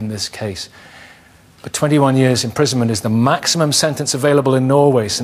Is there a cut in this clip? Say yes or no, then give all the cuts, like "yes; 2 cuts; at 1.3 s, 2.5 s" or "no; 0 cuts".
no; 0 cuts